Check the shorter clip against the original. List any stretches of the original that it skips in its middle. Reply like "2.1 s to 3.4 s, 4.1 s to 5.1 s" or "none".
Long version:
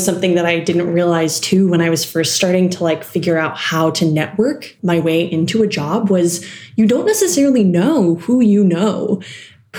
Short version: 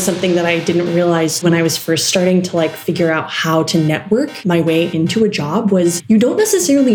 1.4 s to 1.7 s, 4.6 s to 4.7 s, 6.4 s to 6.7 s